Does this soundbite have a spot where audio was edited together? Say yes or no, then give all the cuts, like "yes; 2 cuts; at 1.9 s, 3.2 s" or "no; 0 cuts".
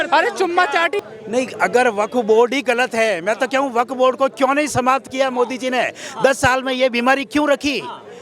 yes; 1 cut; at 1.0 s